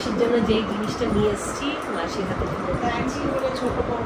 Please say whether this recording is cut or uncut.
uncut